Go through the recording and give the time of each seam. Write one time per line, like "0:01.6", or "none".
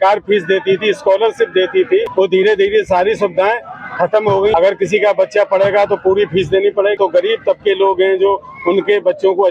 0:02.1
0:04.5
0:07.0

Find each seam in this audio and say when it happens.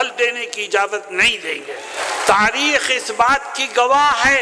0:02.0

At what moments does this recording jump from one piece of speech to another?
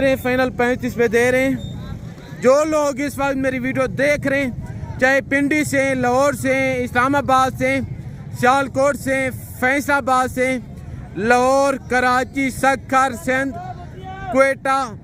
none

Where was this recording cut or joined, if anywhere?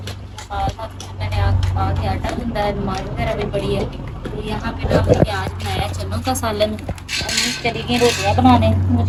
none

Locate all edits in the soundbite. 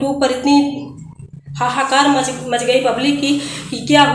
none

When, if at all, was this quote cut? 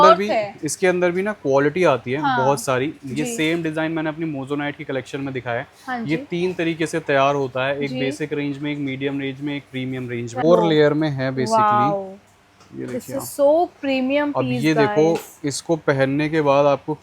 0:10.4

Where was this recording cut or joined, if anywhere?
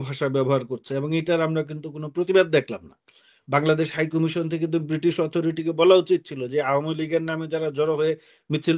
none

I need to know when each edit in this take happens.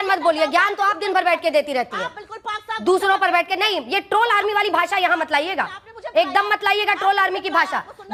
none

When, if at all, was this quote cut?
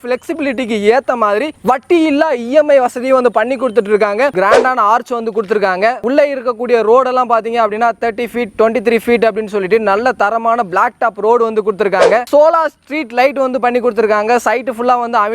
0:04.3
0:06.0
0:12.2

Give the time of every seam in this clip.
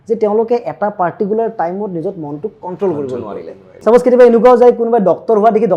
0:03.6

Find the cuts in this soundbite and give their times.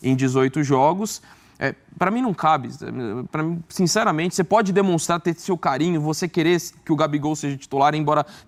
none

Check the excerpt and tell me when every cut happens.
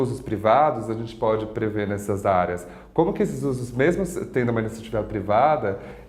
none

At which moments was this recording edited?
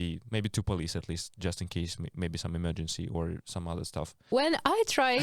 0:04.2

